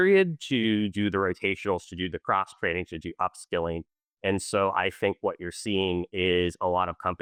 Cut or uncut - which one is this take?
uncut